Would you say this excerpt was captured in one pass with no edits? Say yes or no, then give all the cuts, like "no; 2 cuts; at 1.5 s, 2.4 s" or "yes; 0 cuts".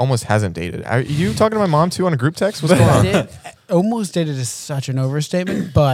yes; 0 cuts